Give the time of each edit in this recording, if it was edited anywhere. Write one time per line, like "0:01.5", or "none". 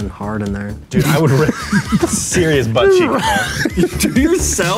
none